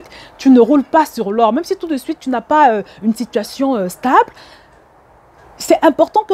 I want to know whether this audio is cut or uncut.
uncut